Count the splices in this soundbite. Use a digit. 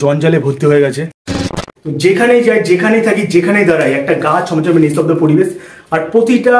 1